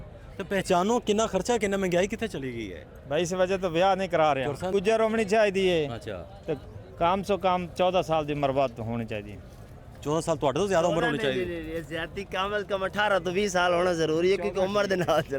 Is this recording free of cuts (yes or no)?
no